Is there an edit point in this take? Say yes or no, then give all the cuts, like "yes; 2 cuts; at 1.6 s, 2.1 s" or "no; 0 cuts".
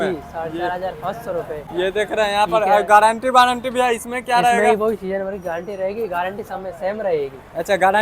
no; 0 cuts